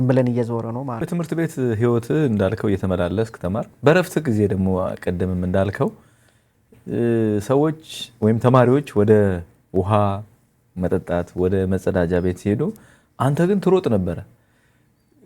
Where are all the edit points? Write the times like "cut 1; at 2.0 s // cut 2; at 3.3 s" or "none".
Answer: cut 1; at 1.1 s